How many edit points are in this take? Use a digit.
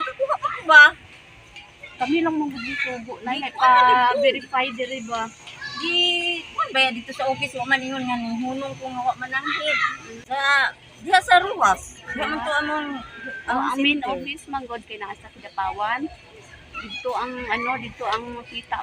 1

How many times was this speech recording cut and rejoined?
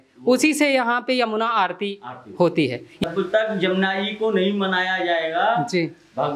1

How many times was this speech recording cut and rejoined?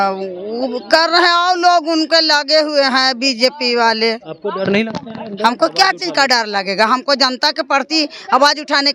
0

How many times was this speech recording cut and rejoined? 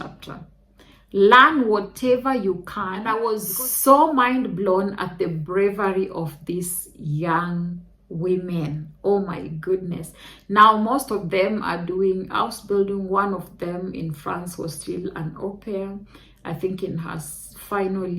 1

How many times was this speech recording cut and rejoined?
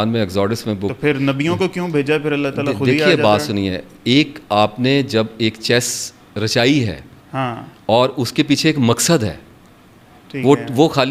0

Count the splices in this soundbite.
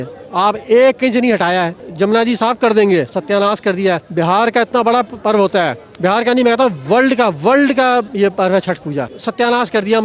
4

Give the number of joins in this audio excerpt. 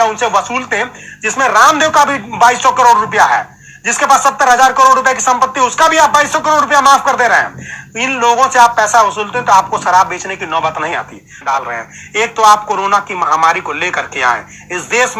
1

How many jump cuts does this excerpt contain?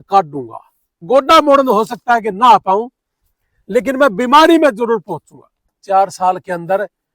2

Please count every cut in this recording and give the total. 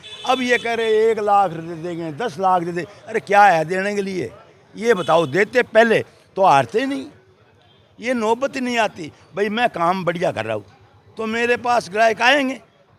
0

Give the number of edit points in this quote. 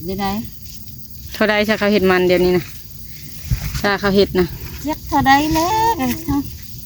0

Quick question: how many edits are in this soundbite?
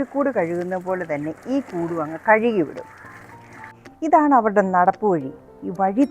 1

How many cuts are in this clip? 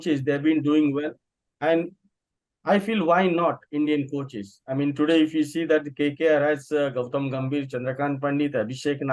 0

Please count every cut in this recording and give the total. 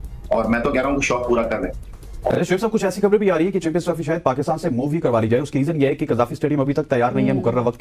1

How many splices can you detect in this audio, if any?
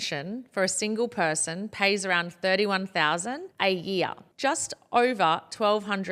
0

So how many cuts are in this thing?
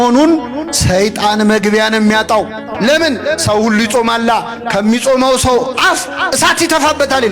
1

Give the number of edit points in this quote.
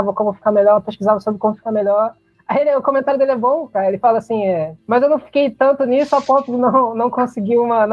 2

